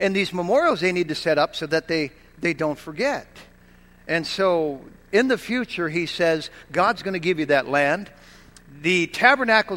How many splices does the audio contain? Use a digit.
0